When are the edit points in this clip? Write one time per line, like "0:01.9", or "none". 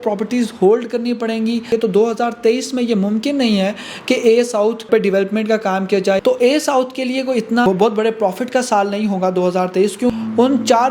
0:01.7
0:06.2
0:07.6
0:10.1

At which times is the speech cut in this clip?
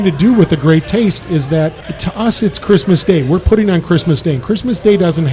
0:01.8

